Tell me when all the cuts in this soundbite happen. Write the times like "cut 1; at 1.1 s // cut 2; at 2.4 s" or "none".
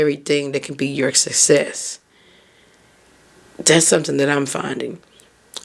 none